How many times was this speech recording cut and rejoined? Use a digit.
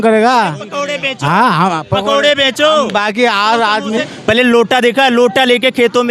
1